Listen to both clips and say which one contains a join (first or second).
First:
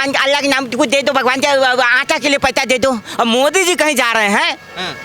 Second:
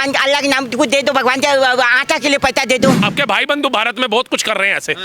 second